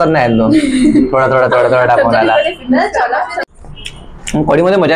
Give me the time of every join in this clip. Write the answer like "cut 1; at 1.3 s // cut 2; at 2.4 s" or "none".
cut 1; at 3.3 s